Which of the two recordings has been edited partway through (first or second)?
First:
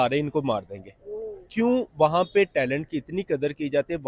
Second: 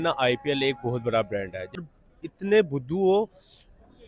second